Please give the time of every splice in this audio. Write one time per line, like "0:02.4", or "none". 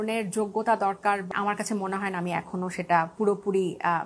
0:01.3